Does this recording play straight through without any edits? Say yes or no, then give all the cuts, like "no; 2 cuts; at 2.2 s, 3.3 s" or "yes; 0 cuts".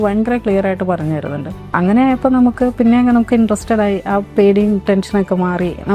no; 1 cut; at 1.5 s